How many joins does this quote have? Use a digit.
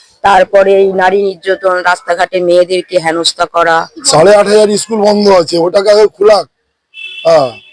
1